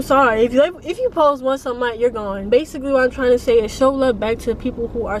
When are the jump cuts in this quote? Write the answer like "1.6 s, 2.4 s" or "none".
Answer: 2.4 s